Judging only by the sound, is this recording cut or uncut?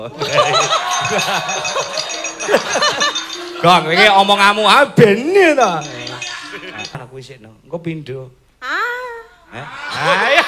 cut